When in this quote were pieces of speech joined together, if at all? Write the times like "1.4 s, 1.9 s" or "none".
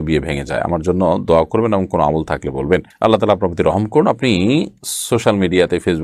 none